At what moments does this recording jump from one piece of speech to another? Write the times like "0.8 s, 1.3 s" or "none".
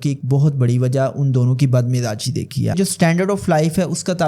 2.7 s